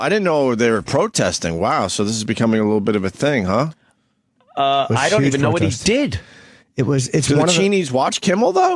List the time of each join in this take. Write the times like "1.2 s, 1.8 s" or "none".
none